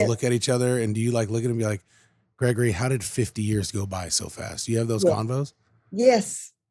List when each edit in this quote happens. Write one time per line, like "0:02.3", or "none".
none

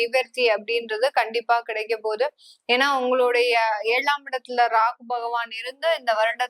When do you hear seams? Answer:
none

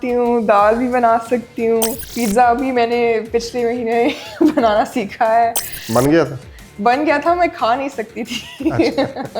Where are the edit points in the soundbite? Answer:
0:02.0

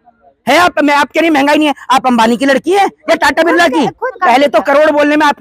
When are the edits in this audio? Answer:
0:04.2

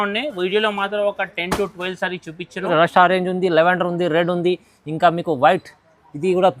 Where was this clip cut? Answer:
0:02.7

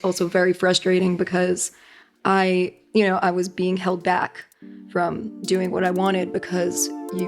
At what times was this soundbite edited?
none

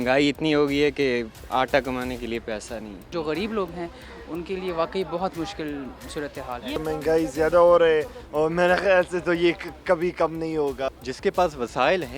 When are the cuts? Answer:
0:03.1
0:06.8
0:10.9

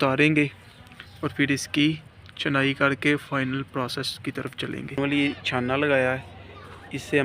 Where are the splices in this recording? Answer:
0:05.0

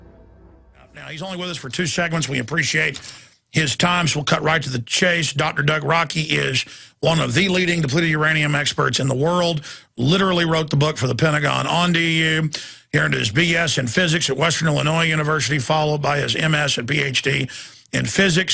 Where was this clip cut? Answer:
none

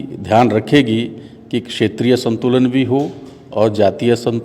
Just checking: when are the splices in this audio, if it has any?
none

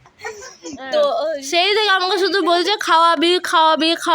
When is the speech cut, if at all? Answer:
0:01.4

